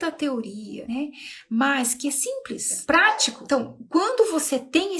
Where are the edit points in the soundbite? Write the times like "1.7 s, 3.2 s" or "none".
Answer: 3.3 s